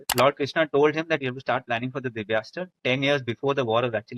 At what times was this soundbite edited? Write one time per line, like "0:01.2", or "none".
0:01.2